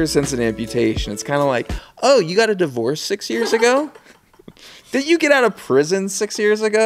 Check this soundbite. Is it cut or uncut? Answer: uncut